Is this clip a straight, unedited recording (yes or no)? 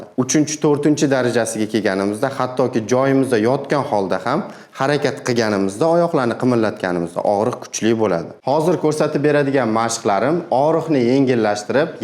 no